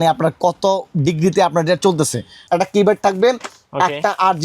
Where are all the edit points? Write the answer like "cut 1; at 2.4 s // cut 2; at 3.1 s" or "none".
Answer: cut 1; at 2.4 s